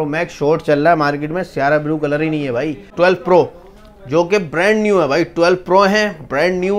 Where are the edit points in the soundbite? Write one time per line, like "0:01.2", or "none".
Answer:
0:02.9